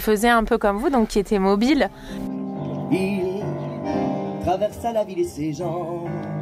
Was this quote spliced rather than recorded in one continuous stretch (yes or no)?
yes